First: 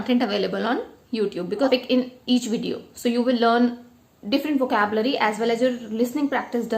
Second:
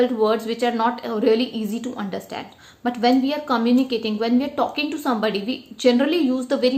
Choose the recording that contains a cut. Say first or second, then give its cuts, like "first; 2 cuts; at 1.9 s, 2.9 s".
first; 1 cut; at 1.7 s